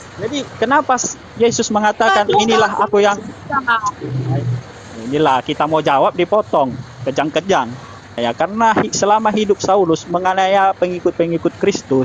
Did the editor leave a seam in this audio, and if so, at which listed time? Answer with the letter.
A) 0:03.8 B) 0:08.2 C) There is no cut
B